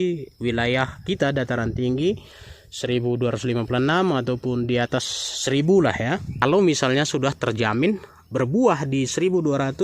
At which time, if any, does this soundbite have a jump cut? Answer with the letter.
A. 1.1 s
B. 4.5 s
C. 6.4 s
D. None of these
C